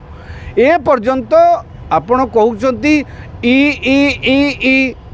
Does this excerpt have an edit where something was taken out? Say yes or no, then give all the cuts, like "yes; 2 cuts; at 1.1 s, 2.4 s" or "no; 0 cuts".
no; 0 cuts